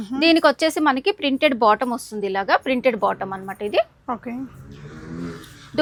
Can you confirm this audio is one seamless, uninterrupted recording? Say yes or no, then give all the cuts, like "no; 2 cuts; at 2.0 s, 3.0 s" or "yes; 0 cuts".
yes; 0 cuts